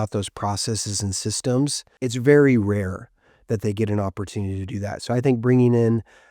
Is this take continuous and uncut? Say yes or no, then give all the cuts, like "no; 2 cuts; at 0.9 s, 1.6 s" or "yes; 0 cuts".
no; 1 cut; at 1.8 s